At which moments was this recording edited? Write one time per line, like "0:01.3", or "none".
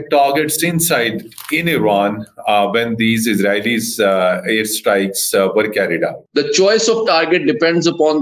0:06.2